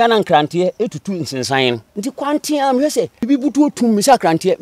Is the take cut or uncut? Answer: cut